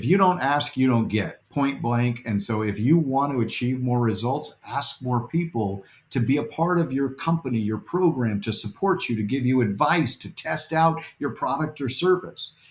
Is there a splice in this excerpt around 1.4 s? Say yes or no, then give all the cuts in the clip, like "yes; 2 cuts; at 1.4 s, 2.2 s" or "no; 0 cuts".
yes; 1 cut; at 1.4 s